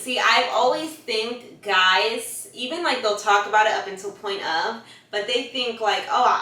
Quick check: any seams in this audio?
no; 0 cuts

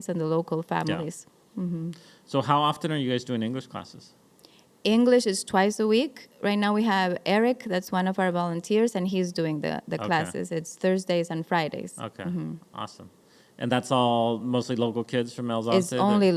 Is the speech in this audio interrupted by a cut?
no; 0 cuts

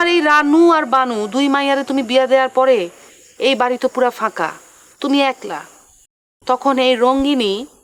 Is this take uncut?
yes; 0 cuts

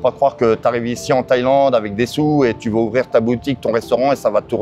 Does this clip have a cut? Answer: no; 0 cuts

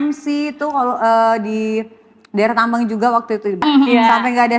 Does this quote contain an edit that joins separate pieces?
yes; 1 cut; at 3.6 s

